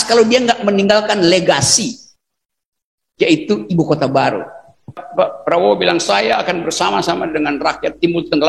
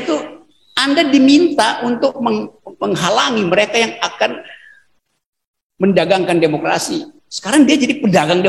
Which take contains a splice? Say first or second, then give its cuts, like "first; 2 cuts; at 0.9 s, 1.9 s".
first; 1 cut; at 5.0 s